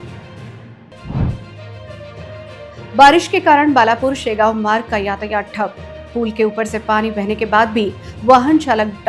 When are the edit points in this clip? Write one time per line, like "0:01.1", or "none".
0:01.0